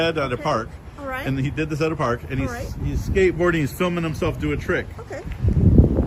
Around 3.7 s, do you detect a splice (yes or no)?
no